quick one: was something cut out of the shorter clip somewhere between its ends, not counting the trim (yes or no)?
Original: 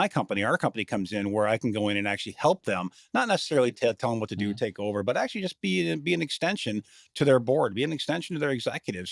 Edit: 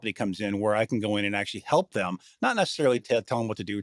no